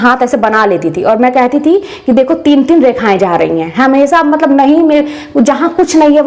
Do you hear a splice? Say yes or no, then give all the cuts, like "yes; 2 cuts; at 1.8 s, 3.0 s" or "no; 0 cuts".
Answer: no; 0 cuts